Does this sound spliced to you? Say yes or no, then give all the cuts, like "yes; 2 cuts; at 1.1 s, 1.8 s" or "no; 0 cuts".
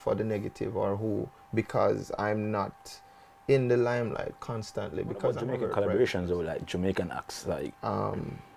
yes; 1 cut; at 5.6 s